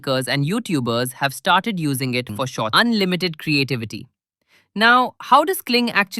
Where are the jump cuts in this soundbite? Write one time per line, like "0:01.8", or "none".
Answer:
0:02.7